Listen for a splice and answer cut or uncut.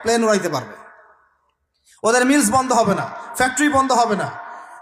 uncut